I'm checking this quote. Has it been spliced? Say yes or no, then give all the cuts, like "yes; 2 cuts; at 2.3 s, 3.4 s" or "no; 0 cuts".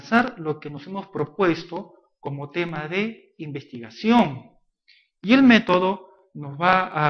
no; 0 cuts